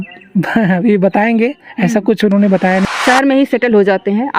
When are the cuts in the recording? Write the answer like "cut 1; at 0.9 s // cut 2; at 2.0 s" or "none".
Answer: cut 1; at 2.8 s